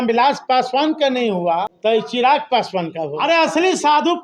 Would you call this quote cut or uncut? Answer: cut